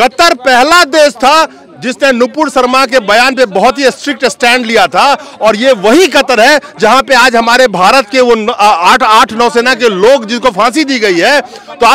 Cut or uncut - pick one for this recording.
uncut